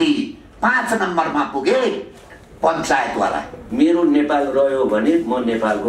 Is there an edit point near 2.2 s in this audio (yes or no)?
no